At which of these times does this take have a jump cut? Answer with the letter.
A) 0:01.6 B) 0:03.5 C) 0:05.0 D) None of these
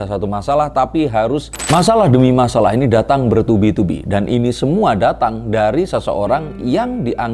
A